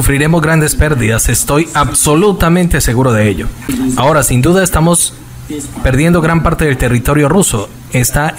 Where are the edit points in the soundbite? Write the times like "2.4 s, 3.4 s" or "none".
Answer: 3.7 s